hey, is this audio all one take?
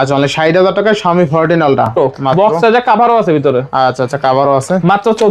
no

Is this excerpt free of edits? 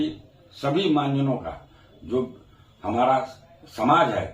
yes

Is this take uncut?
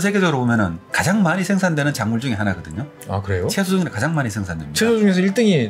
yes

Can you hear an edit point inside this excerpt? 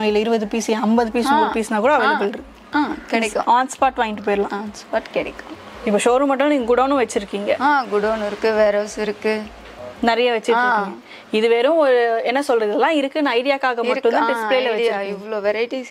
no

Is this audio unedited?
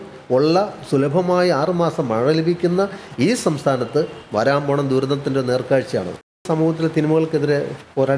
no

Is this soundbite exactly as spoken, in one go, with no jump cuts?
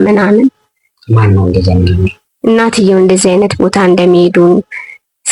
yes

